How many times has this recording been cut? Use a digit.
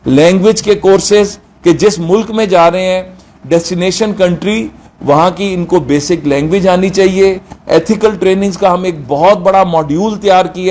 0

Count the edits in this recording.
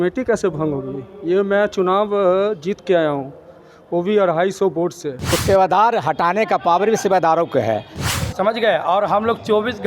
2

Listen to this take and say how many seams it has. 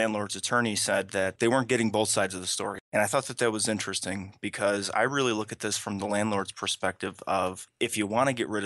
3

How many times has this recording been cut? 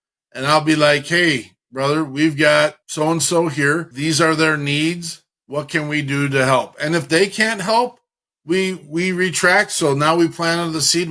2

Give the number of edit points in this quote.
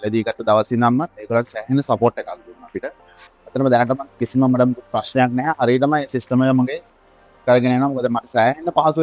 1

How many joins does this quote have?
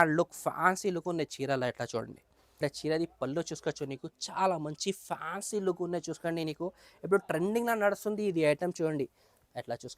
1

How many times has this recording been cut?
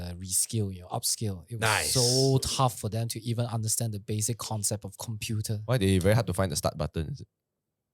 0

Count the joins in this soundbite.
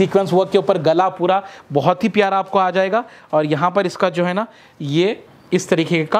0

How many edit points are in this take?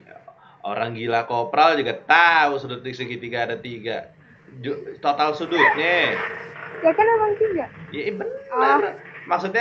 0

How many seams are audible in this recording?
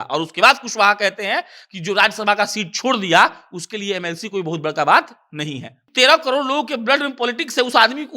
1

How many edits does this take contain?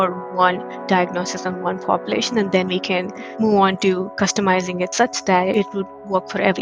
1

